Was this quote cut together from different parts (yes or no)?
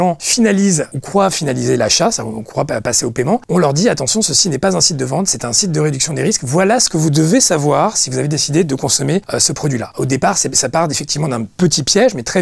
no